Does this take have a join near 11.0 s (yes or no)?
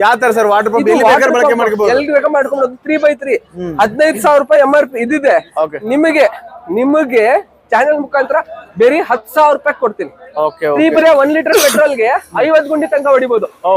yes